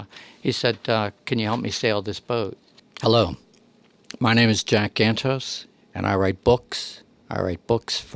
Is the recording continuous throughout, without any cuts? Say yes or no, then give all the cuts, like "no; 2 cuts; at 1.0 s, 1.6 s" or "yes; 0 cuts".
no; 1 cut; at 2.7 s